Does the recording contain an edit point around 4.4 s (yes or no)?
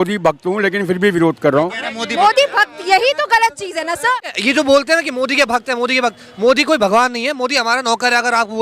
yes